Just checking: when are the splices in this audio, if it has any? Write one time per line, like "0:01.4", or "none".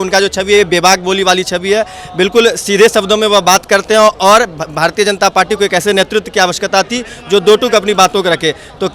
none